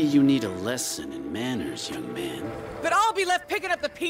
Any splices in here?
yes; 1 cut; at 2.7 s

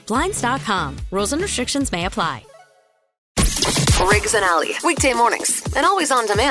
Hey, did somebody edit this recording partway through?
yes; 1 cut; at 3.3 s

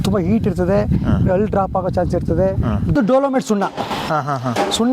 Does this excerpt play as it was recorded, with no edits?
no; 1 cut; at 2.9 s

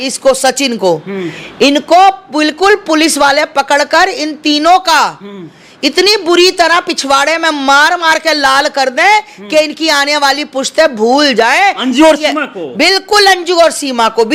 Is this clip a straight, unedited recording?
yes; 0 cuts

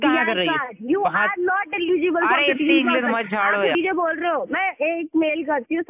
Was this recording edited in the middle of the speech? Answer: yes; 1 cut; at 3.8 s

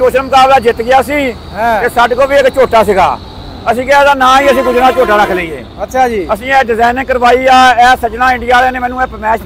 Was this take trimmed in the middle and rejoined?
no; 0 cuts

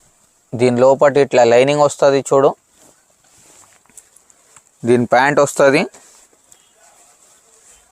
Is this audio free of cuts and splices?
yes; 0 cuts

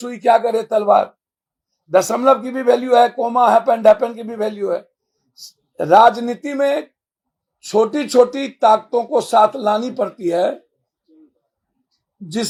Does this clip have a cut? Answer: no; 0 cuts

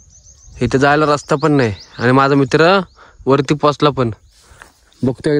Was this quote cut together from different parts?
no; 0 cuts

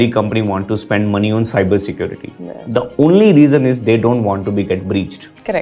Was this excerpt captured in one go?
yes; 0 cuts

